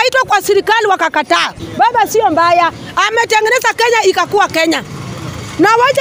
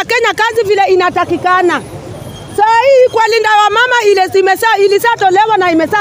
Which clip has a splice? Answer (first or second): first